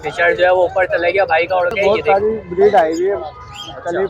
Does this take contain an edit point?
yes; 1 cut; at 1.8 s

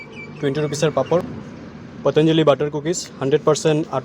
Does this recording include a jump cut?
yes; 1 cut; at 1.3 s

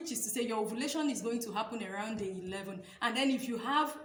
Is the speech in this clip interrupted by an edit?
no; 0 cuts

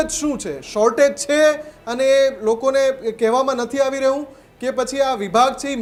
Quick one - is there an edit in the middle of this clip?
no; 0 cuts

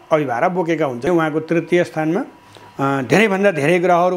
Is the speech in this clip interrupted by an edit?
yes; 1 cut; at 1.1 s

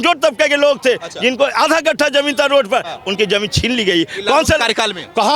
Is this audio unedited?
yes; 0 cuts

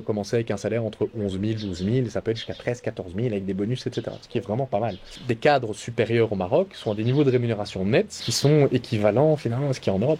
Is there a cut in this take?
yes; 2 cuts; at 5.1 s, 8.3 s

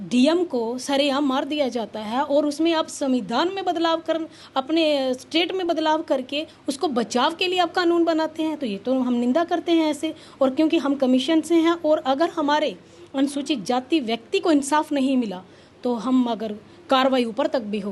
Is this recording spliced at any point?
no; 0 cuts

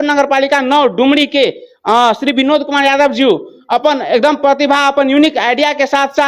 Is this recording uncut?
yes; 0 cuts

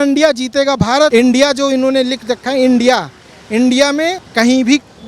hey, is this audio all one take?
no; 2 cuts; at 1.1 s, 4.2 s

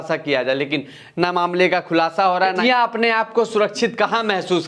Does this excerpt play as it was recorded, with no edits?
no; 1 cut; at 2.6 s

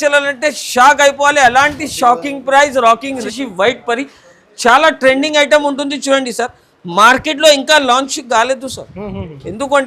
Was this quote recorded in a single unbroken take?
no; 1 cut; at 3.2 s

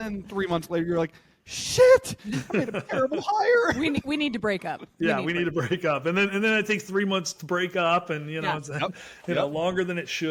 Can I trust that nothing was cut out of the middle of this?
yes; 0 cuts

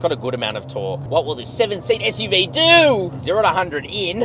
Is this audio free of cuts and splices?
no; 2 cuts; at 1.0 s, 3.2 s

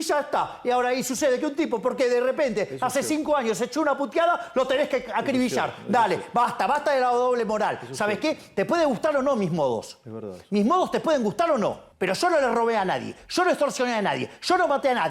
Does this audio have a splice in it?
yes; 1 cut; at 11.9 s

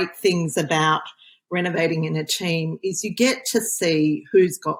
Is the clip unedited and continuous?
yes; 0 cuts

